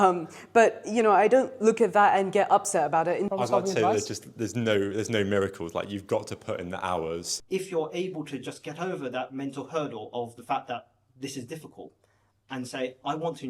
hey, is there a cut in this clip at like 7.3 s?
yes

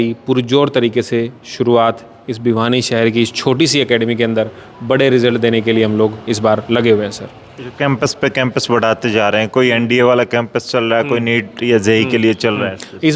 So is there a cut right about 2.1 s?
no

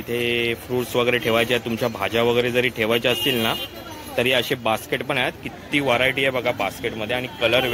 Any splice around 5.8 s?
no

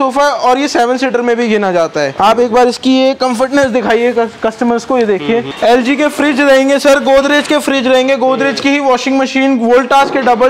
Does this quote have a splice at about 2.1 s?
yes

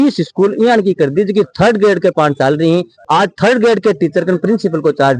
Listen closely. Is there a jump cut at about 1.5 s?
no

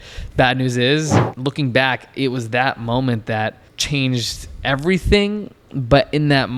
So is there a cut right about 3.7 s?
yes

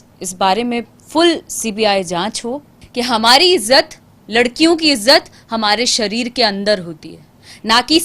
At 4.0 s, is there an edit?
no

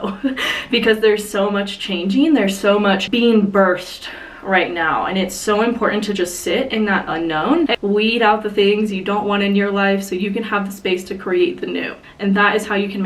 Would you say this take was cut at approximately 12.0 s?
yes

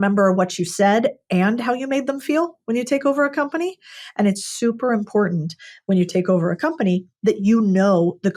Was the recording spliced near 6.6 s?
no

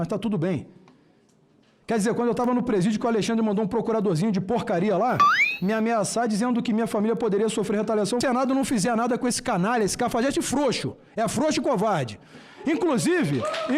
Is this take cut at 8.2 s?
yes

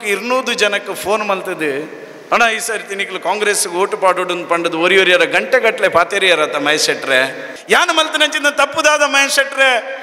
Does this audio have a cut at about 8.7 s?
no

